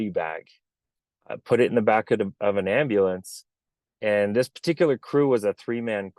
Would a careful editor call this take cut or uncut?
uncut